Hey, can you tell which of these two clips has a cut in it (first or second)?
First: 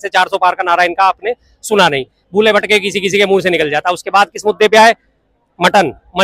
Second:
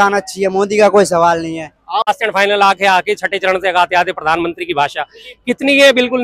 second